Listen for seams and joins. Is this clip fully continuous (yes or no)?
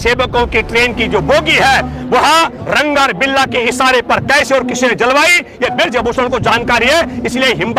yes